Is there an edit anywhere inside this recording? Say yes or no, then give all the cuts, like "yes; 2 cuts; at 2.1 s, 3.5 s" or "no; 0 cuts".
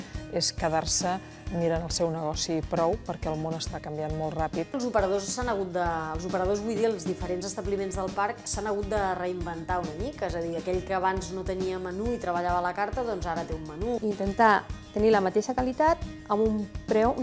yes; 2 cuts; at 4.7 s, 14.0 s